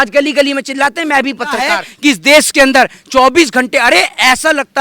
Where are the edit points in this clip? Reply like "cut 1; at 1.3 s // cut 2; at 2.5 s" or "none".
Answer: cut 1; at 1.8 s

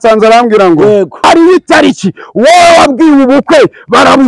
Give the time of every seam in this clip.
cut 1; at 1.2 s

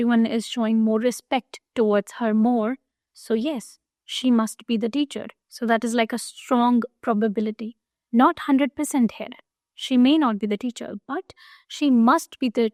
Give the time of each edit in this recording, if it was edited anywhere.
none

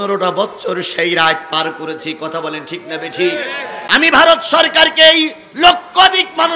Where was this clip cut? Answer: cut 1; at 3.8 s

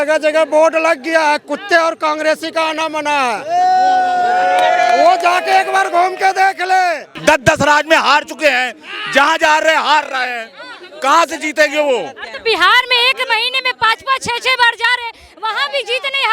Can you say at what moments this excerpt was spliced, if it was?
cut 1; at 7.1 s

